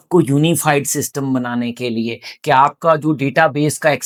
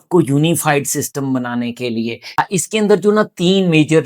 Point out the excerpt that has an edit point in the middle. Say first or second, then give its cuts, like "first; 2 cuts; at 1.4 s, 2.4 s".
second; 1 cut; at 2.4 s